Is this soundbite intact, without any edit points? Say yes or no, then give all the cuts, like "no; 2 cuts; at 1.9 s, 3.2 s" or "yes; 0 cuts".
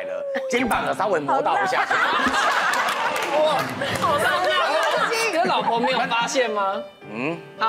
yes; 0 cuts